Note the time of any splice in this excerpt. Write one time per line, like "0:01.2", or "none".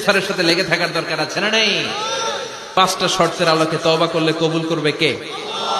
0:02.7